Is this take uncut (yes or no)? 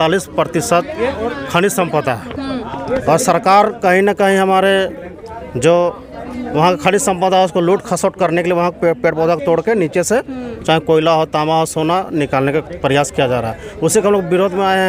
yes